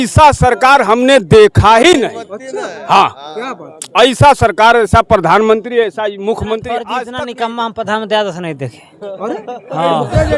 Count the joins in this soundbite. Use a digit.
1